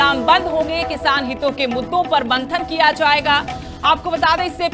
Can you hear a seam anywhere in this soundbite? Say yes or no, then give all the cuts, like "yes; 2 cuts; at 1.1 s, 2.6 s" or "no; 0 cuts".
no; 0 cuts